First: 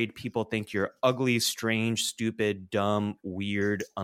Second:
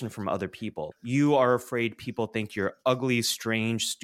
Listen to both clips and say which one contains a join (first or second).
second